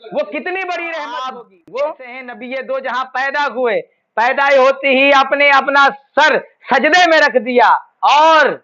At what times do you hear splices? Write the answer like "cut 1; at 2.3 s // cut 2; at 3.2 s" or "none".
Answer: cut 1; at 2.3 s